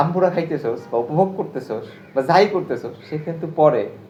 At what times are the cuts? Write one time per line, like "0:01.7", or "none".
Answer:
none